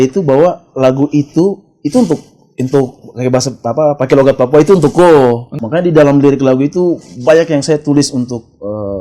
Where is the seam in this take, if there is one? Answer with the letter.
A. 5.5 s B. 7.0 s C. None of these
A